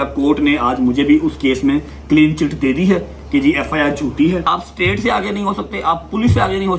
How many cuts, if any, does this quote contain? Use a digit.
1